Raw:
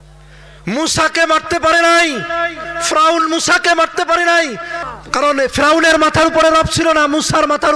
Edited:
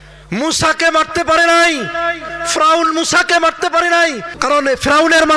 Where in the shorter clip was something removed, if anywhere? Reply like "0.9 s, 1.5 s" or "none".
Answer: 4.3 s